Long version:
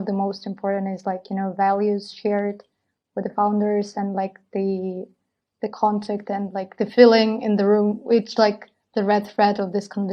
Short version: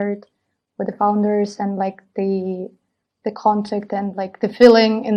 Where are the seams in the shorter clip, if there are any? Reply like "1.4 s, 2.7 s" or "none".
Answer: none